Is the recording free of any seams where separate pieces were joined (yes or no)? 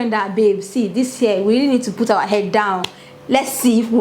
yes